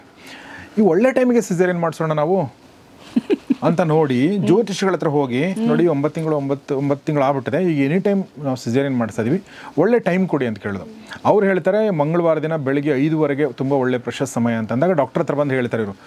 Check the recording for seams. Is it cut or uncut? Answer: uncut